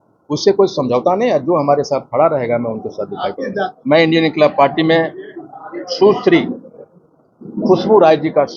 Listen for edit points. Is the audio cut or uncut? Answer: cut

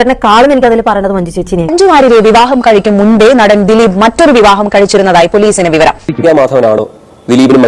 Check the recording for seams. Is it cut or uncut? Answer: cut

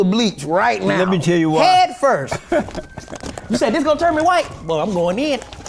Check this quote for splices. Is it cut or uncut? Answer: uncut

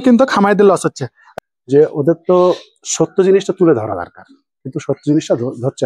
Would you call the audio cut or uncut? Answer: cut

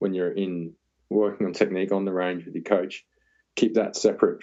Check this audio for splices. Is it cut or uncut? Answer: uncut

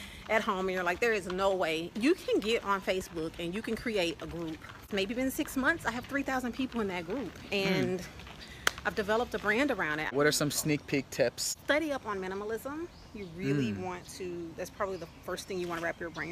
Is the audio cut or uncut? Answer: cut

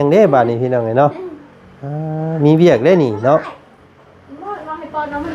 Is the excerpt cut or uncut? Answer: uncut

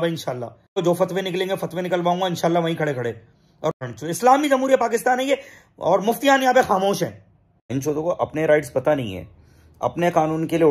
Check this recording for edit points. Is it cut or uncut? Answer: cut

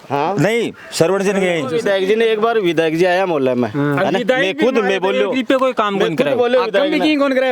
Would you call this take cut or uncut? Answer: cut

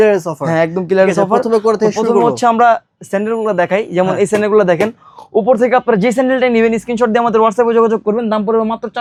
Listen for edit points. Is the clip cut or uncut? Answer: uncut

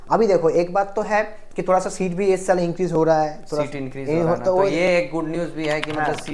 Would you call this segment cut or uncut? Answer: uncut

